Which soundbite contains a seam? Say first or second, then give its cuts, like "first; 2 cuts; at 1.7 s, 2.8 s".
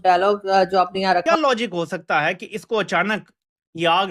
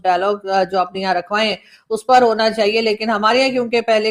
first; 1 cut; at 1.2 s